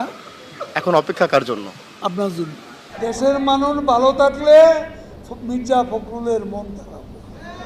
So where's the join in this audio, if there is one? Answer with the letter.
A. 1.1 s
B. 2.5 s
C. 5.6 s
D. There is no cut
D